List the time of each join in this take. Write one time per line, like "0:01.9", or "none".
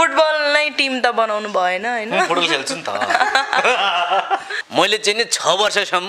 0:04.6